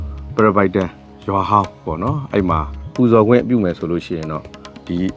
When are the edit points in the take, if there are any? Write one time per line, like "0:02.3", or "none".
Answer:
0:01.1
0:02.8